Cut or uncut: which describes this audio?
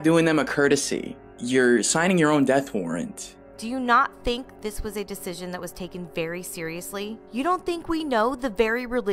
cut